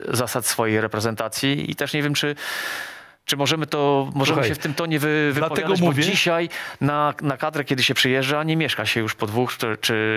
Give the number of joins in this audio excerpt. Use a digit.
0